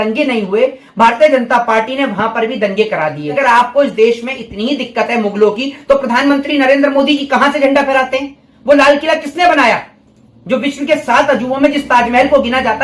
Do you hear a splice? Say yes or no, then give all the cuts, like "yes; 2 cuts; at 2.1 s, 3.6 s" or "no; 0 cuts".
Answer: yes; 1 cut; at 3.4 s